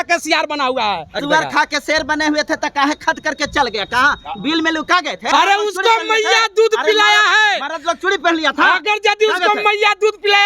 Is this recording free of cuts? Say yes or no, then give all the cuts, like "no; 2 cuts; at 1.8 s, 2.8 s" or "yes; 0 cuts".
no; 2 cuts; at 1.2 s, 5.2 s